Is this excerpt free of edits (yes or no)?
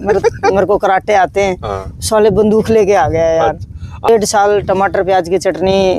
no